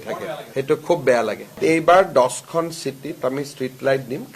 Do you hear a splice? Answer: yes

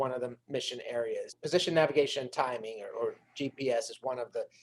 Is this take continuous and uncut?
no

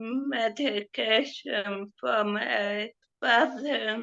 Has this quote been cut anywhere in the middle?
yes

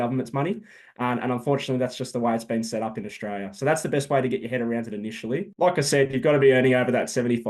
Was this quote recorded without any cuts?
yes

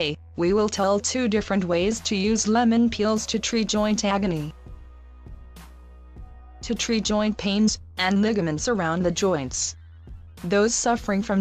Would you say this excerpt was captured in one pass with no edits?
yes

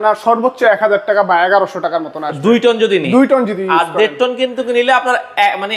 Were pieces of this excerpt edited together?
no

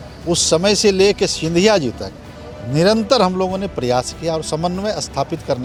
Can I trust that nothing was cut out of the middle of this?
yes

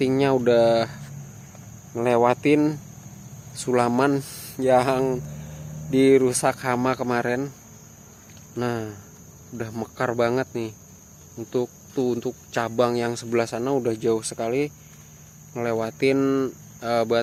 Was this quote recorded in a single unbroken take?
yes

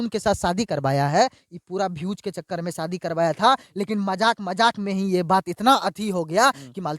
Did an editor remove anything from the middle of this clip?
no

